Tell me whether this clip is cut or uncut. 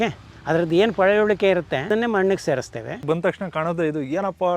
cut